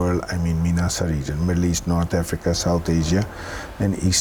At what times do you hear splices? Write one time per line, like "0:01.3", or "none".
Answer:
none

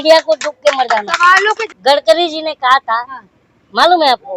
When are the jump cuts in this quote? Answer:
0:01.7

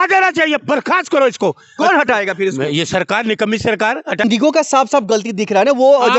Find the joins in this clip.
0:04.2

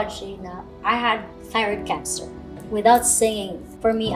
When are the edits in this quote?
0:02.4

